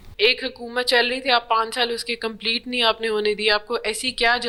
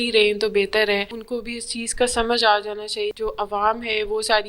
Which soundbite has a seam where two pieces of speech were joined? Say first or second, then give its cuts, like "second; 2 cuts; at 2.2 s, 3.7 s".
second; 2 cuts; at 1.2 s, 3.1 s